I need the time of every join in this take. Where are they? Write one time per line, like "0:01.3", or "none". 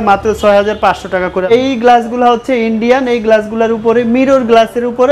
0:01.5